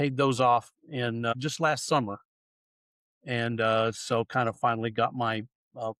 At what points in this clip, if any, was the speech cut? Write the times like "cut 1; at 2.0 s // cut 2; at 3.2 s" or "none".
cut 1; at 1.3 s